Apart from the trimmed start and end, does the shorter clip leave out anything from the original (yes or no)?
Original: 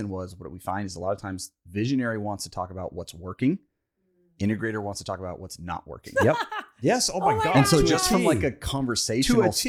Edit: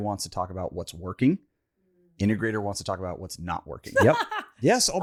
no